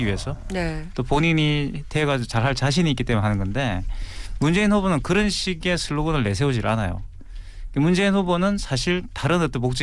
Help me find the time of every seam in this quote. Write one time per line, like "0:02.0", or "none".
none